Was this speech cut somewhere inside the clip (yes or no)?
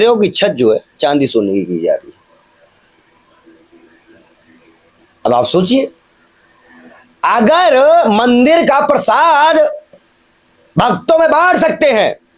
no